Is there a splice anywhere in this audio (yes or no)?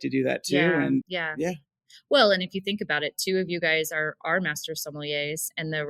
yes